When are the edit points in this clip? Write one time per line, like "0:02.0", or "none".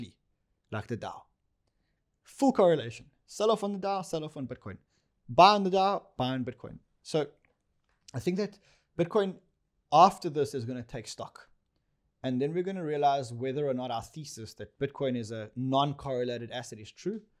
none